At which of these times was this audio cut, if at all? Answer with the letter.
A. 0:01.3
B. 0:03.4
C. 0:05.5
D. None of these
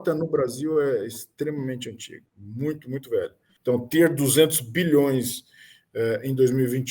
B